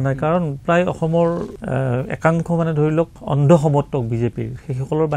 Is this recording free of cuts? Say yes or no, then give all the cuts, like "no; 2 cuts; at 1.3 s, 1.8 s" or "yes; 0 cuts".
no; 2 cuts; at 1.5 s, 3.2 s